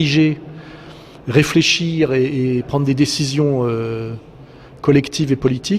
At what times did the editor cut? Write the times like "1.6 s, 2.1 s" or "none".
2.6 s